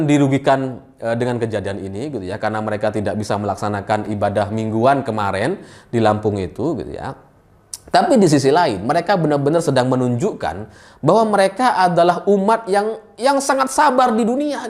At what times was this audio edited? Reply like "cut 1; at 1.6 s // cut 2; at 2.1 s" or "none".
none